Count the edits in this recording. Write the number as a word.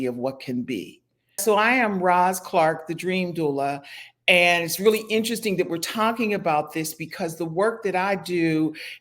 one